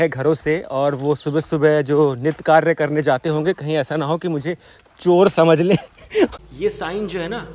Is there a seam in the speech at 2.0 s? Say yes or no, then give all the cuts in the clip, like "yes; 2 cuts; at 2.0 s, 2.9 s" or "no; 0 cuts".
no; 1 cut; at 6.4 s